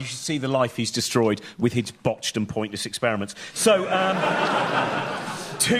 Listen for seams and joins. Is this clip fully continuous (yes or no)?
no